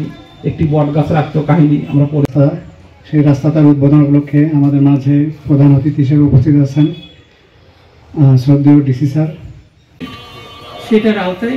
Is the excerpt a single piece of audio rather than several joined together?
yes; 0 cuts

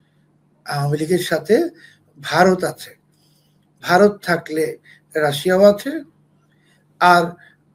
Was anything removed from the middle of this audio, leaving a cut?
no; 0 cuts

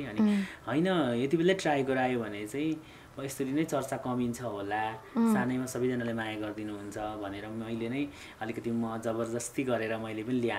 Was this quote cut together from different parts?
no; 0 cuts

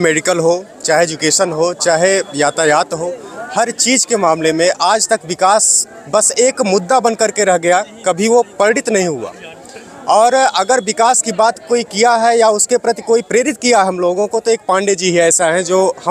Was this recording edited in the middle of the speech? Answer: no; 0 cuts

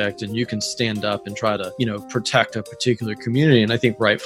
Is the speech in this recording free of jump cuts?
no; 1 cut; at 1.7 s

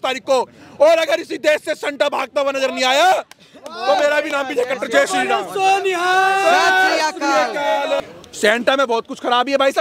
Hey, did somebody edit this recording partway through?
yes; 1 cut; at 8.0 s

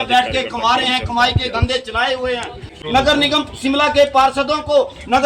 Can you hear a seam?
yes; 1 cut; at 2.7 s

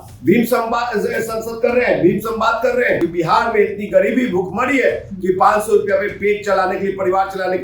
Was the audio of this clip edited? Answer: yes; 1 cut; at 3.1 s

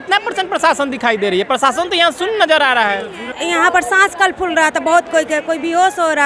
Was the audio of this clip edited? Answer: yes; 1 cut; at 3.3 s

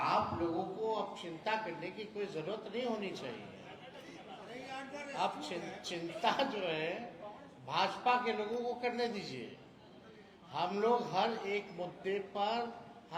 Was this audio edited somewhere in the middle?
no; 0 cuts

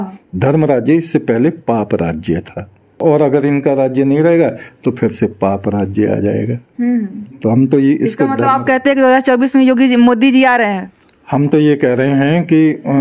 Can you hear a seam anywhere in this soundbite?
yes; 1 cut; at 3.0 s

